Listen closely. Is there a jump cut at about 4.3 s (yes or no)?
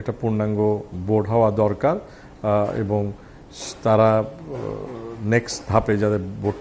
no